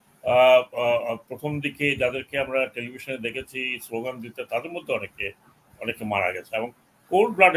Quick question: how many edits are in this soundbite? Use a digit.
0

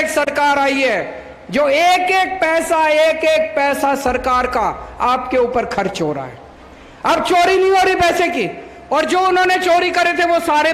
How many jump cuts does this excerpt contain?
0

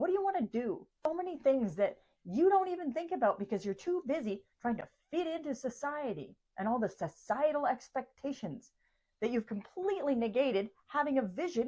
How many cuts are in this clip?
1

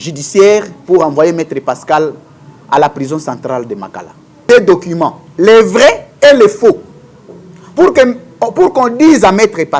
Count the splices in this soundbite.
1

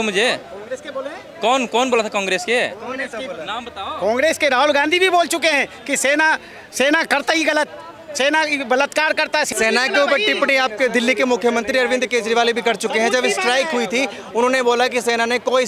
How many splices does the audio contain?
1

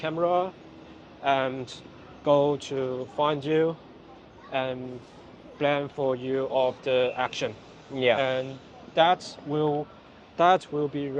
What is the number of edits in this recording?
0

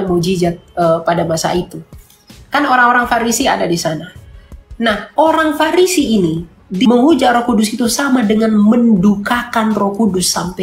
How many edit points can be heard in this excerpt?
1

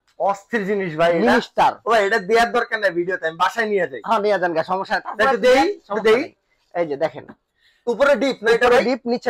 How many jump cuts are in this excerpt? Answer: 0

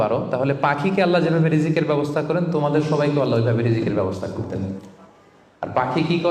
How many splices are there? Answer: 0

